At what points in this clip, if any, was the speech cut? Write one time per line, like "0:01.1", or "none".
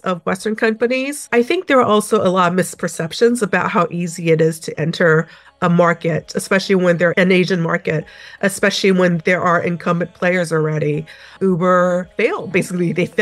0:01.2
0:07.1
0:11.3
0:12.5